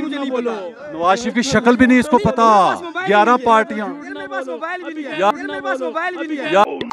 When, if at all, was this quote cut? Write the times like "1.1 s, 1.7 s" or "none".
none